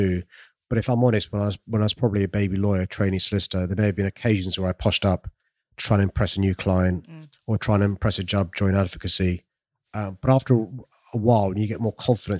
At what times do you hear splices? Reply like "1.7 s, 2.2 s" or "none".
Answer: none

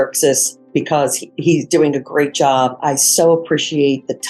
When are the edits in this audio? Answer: 2.8 s

